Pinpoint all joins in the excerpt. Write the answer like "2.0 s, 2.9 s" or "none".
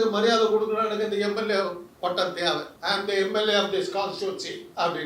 2.7 s